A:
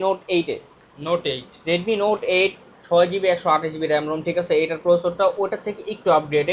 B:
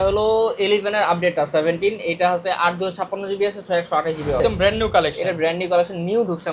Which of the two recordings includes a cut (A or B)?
B